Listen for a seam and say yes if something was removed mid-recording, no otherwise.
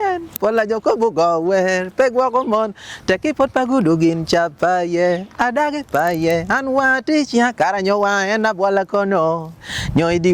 no